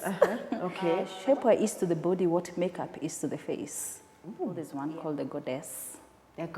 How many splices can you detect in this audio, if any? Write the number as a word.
two